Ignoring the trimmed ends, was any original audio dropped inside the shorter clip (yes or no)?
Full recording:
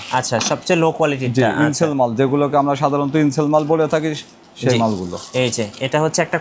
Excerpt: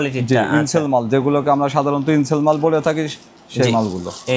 no